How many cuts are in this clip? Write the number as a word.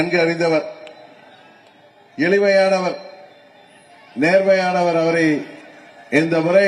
zero